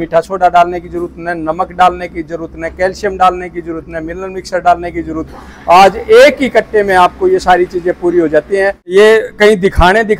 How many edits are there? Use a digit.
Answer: 1